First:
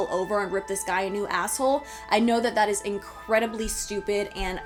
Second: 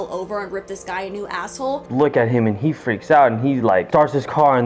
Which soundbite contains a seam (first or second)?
second